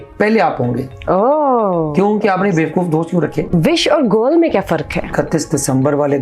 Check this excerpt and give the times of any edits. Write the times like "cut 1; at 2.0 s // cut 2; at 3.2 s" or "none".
cut 1; at 3.5 s // cut 2; at 5.1 s